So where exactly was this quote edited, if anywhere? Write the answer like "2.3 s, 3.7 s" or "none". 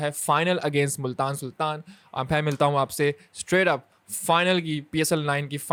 none